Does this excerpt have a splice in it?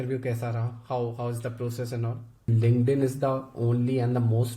yes; 1 cut; at 2.3 s

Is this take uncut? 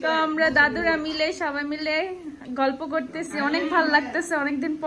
yes; 0 cuts

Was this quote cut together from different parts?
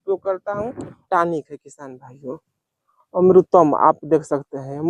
yes; 1 cut; at 1.0 s

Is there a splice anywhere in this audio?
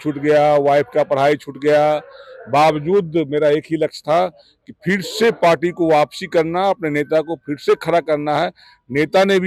no; 0 cuts

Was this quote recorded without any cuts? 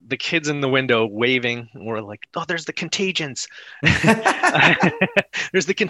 yes; 0 cuts

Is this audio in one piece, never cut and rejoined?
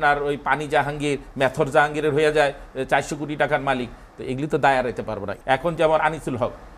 no; 1 cut; at 5.3 s

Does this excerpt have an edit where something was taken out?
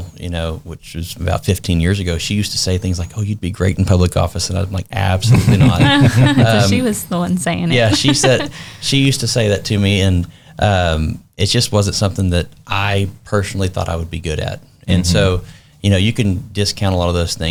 no; 0 cuts

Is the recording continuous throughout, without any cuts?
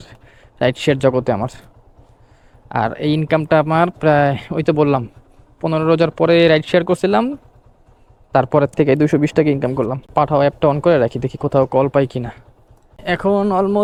yes; 0 cuts

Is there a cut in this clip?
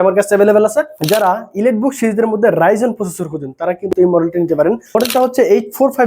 yes; 2 cuts; at 1.0 s, 4.9 s

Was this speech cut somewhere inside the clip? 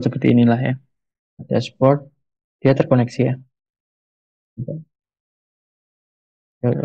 yes; 1 cut; at 1.4 s

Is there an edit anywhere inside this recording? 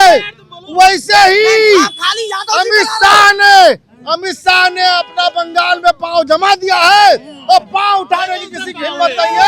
no; 0 cuts

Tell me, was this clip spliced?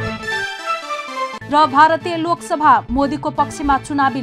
no; 0 cuts

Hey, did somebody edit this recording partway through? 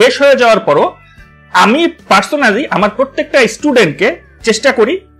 no; 0 cuts

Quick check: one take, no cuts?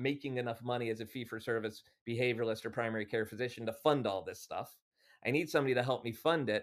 yes; 0 cuts

